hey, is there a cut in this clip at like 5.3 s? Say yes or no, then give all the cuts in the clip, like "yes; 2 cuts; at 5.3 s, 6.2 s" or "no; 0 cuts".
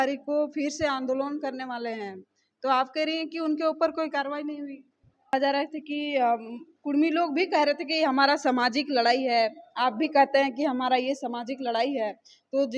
yes; 1 cut; at 5.3 s